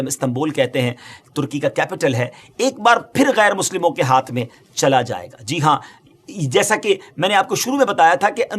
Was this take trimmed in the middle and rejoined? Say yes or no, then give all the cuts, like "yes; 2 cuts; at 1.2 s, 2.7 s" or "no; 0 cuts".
no; 0 cuts